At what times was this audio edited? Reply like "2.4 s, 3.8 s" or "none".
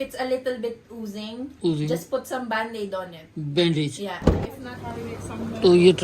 4.6 s